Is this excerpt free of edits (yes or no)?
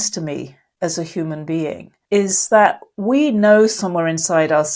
no